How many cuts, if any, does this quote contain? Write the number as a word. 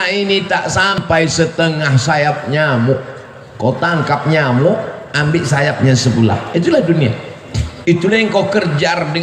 one